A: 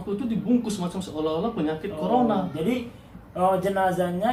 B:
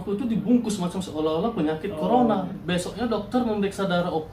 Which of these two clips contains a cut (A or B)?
B